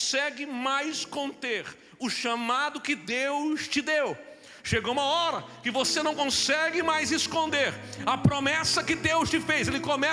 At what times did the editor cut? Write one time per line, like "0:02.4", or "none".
none